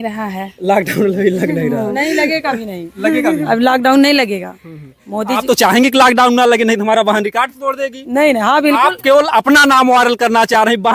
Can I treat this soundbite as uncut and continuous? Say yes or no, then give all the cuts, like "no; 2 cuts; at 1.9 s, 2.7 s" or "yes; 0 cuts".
yes; 0 cuts